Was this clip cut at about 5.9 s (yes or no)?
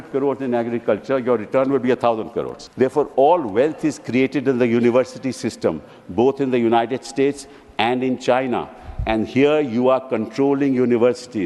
no